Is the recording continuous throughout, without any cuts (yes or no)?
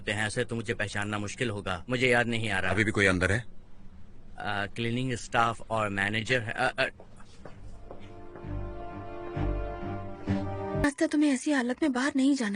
no